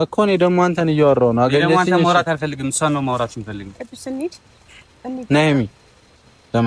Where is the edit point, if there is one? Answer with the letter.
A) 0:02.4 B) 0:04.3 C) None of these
C